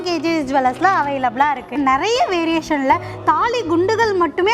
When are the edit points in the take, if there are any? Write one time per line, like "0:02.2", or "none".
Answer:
0:01.8